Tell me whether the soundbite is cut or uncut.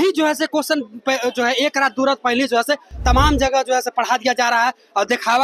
uncut